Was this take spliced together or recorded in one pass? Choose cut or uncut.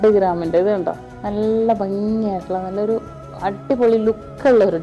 cut